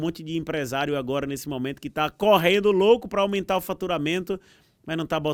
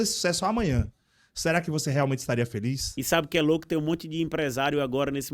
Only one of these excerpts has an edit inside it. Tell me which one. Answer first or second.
second